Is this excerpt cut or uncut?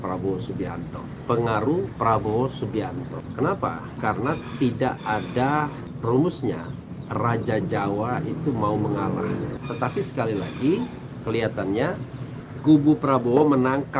cut